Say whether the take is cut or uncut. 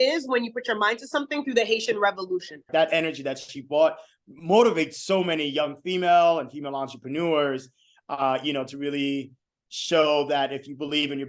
cut